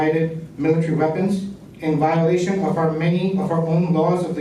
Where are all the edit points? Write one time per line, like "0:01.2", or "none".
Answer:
none

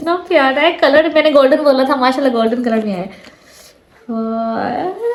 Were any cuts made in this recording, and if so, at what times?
none

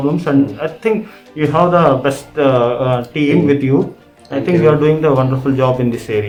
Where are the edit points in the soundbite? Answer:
none

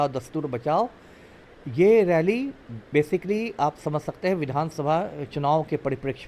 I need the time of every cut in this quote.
none

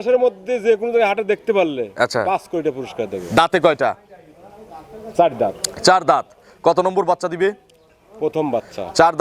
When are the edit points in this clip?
none

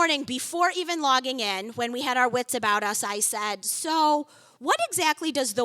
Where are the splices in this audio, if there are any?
none

